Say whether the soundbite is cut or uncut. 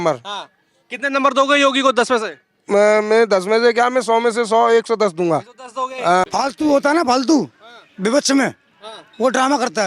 cut